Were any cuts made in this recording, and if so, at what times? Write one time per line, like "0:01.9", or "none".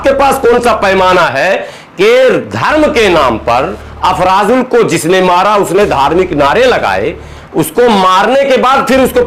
none